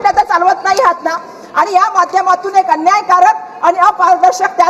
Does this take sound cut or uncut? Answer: uncut